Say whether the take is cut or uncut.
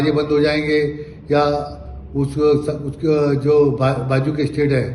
uncut